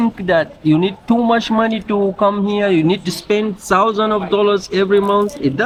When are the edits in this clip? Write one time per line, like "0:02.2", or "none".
none